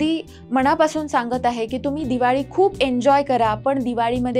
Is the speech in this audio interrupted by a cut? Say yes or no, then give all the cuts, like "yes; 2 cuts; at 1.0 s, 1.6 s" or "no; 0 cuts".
no; 0 cuts